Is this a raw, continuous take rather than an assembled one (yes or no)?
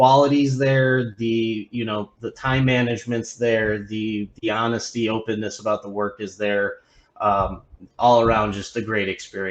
yes